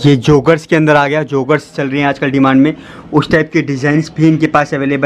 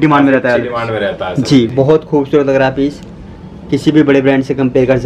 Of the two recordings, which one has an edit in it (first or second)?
second